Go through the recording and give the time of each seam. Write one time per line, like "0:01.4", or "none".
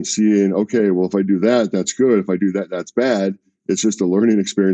0:03.5